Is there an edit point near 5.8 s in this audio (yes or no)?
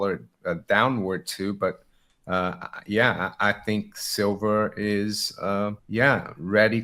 yes